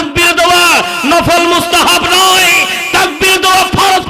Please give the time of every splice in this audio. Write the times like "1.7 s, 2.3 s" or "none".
none